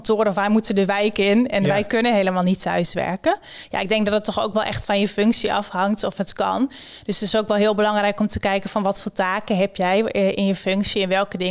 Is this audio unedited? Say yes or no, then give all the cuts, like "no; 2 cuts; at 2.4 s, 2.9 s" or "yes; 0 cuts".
yes; 0 cuts